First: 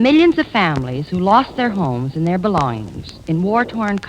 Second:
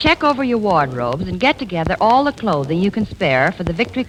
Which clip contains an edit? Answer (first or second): first